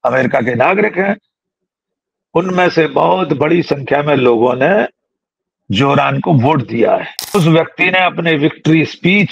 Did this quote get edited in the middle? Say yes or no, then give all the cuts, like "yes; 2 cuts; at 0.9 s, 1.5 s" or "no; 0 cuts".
yes; 1 cut; at 7.3 s